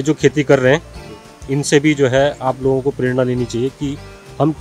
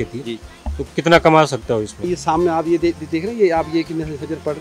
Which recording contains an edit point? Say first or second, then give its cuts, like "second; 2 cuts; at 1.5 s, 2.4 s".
second; 1 cut; at 2.1 s